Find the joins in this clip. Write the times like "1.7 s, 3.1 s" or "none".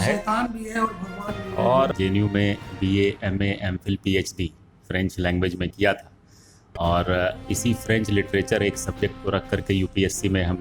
1.9 s